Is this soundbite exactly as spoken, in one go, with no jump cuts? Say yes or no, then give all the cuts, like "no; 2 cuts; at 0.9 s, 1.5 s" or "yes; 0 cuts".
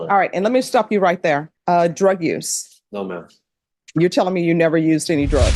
no; 1 cut; at 1.5 s